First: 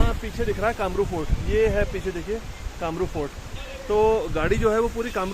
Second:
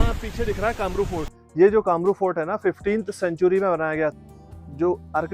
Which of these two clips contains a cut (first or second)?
second